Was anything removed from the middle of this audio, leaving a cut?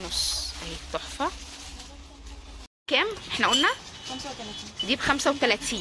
yes; 1 cut; at 2.8 s

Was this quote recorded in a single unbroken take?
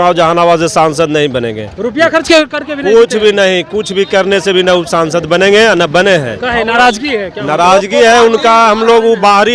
yes; 0 cuts

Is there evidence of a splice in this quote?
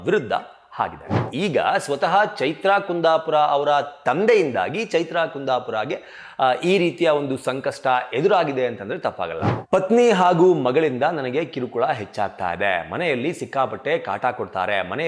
yes; 2 cuts; at 1.3 s, 9.5 s

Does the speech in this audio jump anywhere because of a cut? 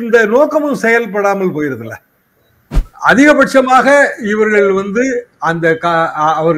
yes; 1 cut; at 2.9 s

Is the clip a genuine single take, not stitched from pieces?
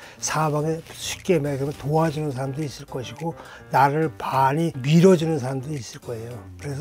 no; 1 cut; at 4.8 s

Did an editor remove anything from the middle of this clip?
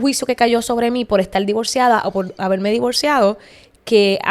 no; 0 cuts

